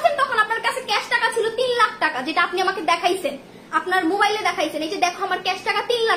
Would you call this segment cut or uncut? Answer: uncut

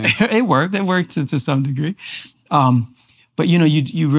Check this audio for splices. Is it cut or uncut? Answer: uncut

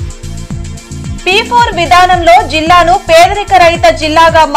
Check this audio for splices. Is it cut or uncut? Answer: uncut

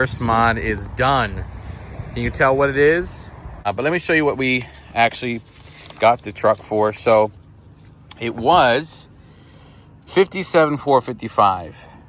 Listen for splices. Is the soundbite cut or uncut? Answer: cut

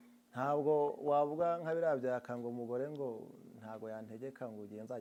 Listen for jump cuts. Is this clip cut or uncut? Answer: uncut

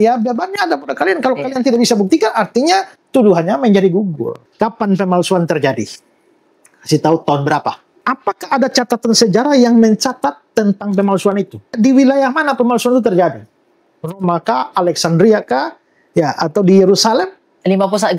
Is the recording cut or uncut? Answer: cut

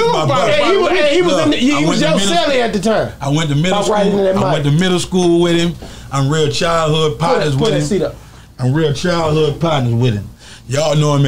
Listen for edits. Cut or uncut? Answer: uncut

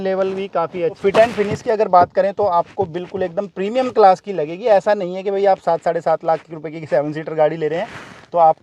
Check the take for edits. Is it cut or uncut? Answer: cut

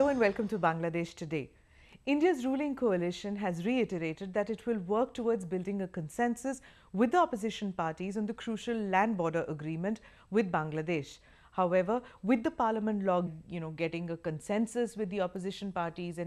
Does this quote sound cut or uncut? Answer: uncut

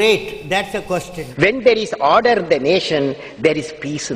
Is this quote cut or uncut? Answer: cut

